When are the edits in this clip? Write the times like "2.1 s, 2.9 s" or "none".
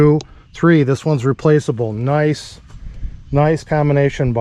none